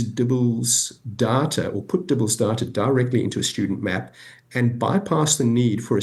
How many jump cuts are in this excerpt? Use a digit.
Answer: 0